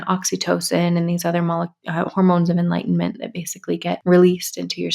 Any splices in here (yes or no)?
yes